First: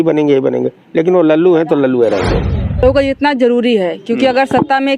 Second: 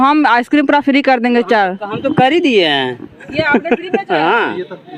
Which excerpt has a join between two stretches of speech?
first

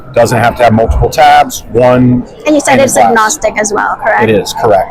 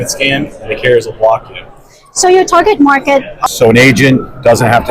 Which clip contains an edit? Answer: second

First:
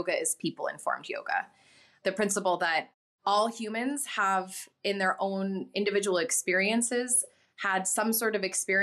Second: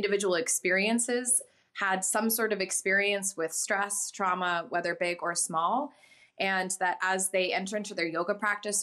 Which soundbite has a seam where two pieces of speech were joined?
first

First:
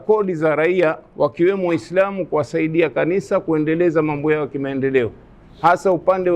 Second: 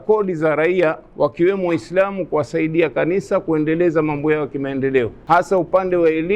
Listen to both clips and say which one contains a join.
second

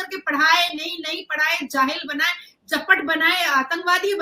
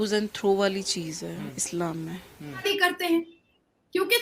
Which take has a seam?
second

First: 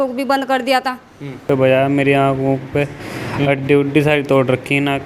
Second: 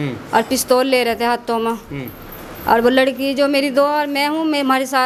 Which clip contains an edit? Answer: first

